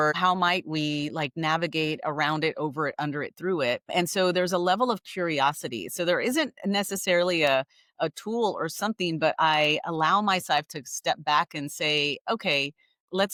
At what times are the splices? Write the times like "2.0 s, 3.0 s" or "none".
none

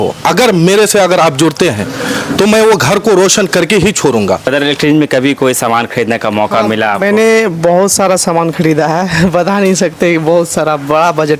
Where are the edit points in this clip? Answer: 4.5 s

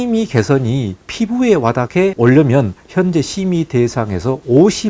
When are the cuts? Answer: 2.0 s

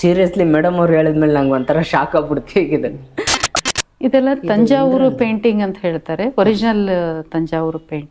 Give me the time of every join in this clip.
3.5 s

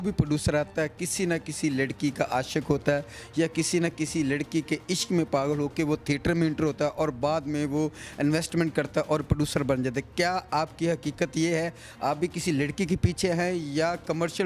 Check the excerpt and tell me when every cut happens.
none

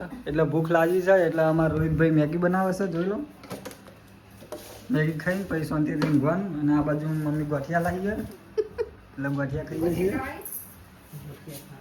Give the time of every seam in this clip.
none

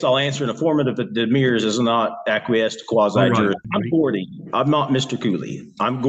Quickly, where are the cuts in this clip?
3.6 s

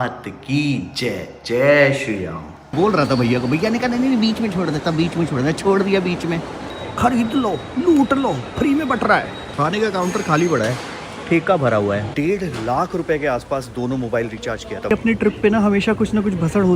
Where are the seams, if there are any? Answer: 2.7 s, 6.6 s, 9.4 s, 12.1 s, 14.9 s

